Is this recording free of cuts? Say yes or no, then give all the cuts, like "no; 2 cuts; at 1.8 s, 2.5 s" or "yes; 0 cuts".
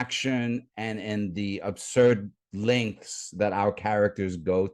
yes; 0 cuts